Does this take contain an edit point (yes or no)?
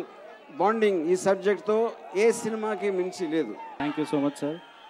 yes